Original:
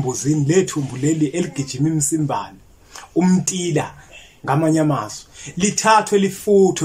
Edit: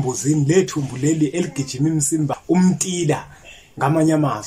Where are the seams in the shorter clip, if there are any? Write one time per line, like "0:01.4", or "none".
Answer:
0:02.4